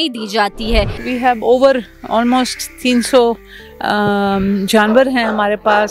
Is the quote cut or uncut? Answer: cut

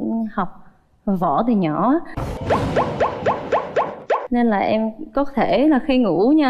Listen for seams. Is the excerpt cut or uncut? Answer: uncut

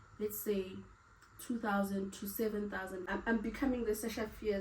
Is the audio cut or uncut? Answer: cut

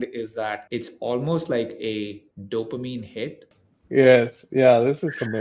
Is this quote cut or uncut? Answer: cut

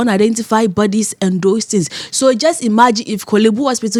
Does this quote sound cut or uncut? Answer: uncut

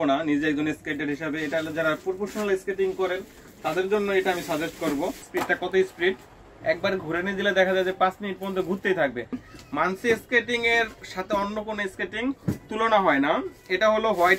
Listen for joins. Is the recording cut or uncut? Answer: cut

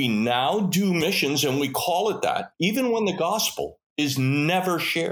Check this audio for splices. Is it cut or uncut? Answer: cut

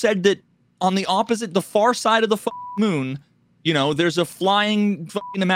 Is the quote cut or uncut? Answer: uncut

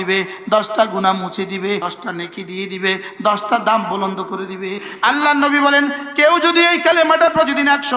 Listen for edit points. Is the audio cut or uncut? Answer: cut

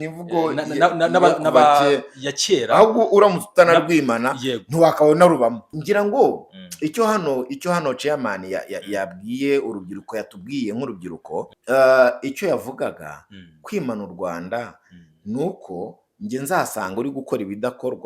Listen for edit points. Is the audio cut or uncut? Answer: cut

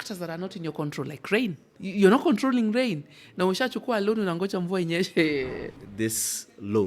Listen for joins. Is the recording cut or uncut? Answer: cut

